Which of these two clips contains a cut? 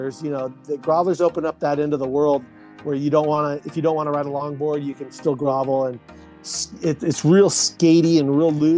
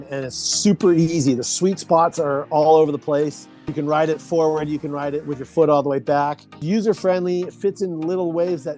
second; 2 cuts; at 3.7 s, 6.6 s

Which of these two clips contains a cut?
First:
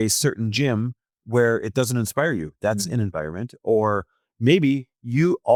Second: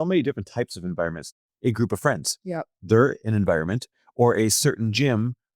second; 1 cut; at 1.3 s

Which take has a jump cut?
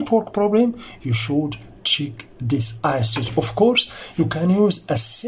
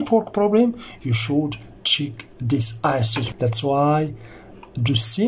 second; 1 cut; at 3.2 s

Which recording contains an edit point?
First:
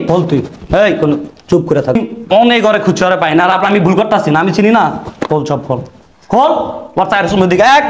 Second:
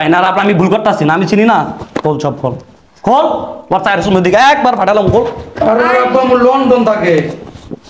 first; 1 cut; at 2.0 s

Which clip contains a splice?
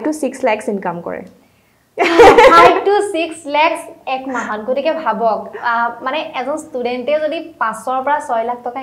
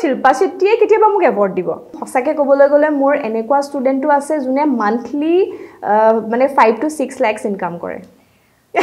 second; 1 cut; at 2.0 s

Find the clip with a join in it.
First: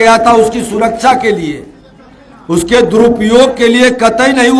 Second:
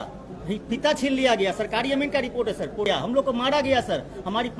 second; 1 cut; at 2.9 s

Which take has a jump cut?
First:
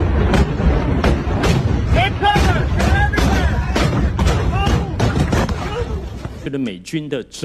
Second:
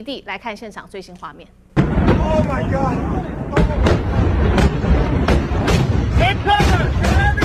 first; 1 cut; at 6.4 s

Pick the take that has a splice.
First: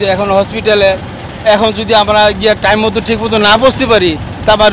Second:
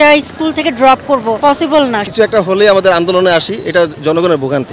second; 1 cut; at 1.7 s

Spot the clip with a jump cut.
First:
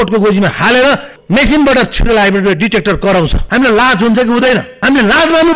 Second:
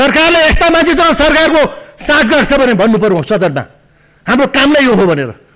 first; 3 cuts; at 1.1 s, 3.4 s, 4.7 s

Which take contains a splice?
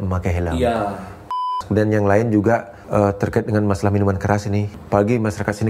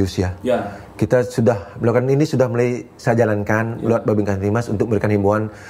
first; 3 cuts; at 1.5 s, 2.8 s, 4.7 s

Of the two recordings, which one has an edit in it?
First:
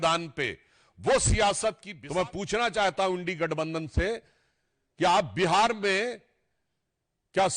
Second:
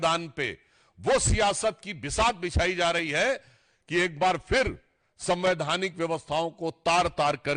first; 1 cut; at 1.9 s

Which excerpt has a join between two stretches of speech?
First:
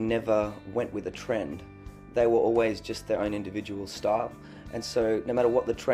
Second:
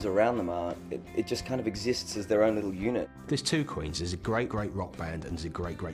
second; 2 cuts; at 3.1 s, 4.5 s

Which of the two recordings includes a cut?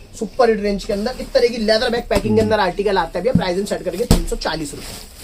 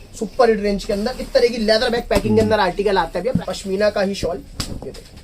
second; 1 cut; at 3.4 s

